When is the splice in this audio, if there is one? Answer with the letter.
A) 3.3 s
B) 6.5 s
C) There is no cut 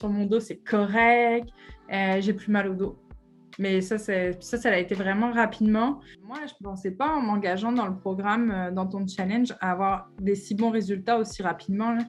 B